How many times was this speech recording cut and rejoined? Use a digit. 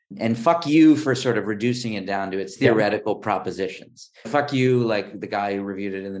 1